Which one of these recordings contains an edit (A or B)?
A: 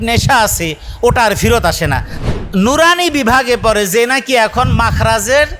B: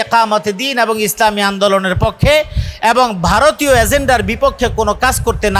A